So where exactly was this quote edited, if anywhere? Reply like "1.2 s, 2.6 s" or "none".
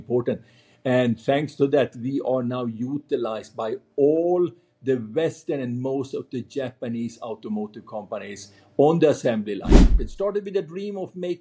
10.0 s